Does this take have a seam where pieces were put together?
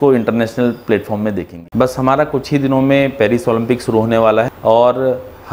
yes; 2 cuts; at 1.5 s, 4.5 s

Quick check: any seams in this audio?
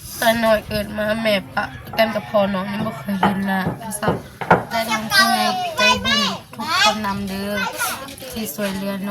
yes; 1 cut; at 4.7 s

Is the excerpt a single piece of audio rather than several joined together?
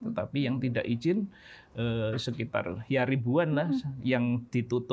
yes; 0 cuts

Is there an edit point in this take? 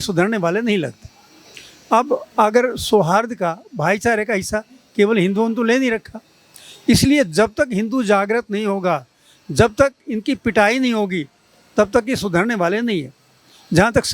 no; 0 cuts

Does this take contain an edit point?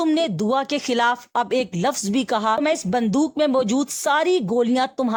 no; 0 cuts

